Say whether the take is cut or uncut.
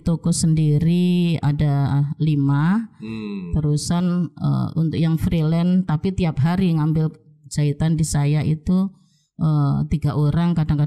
uncut